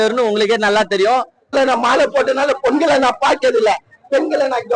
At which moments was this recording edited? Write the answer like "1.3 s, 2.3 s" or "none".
1.4 s